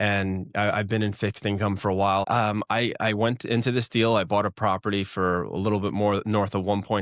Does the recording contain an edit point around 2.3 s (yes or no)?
yes